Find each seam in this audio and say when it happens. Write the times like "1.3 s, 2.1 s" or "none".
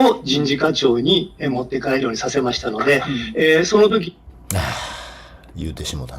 4.3 s